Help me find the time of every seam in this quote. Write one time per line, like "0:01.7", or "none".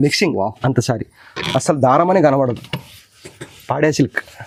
none